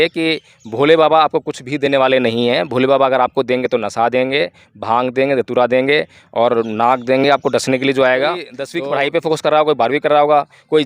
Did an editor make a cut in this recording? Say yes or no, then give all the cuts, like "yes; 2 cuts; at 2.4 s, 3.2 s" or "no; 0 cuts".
yes; 1 cut; at 8.6 s